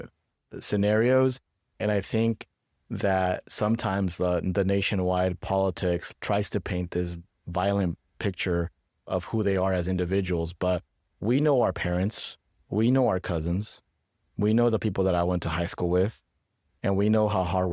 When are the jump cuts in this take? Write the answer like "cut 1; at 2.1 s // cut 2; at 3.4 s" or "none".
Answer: cut 1; at 6.1 s